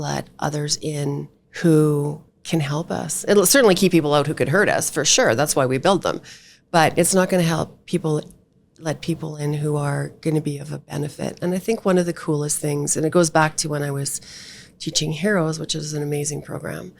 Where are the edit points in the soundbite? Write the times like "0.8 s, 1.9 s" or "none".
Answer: 1.4 s